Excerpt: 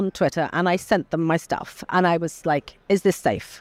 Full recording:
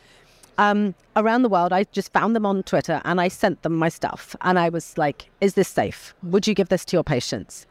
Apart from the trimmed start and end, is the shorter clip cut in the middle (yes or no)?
no